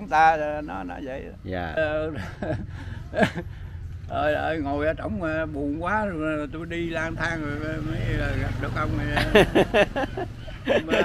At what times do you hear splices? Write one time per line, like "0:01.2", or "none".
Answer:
0:01.8